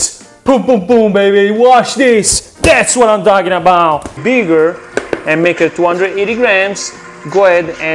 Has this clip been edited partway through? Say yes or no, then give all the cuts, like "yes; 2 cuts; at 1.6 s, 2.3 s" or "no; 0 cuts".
yes; 1 cut; at 4.2 s